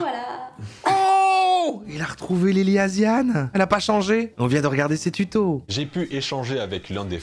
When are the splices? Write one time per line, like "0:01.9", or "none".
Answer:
0:03.5
0:04.4
0:05.7

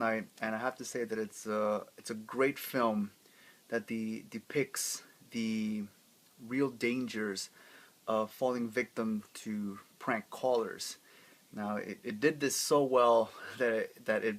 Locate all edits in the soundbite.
0:11.4

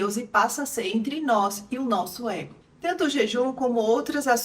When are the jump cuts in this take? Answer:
0:02.5

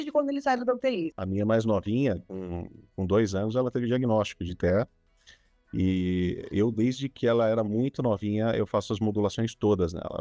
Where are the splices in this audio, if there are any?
0:01.2

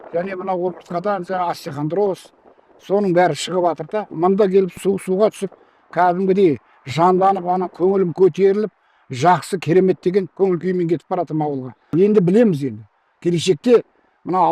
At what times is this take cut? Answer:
0:11.7

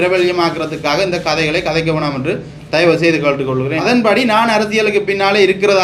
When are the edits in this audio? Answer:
0:03.8

